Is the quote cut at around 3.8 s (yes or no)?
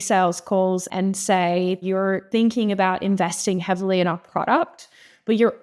no